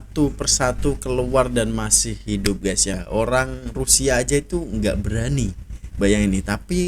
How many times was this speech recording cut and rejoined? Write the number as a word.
one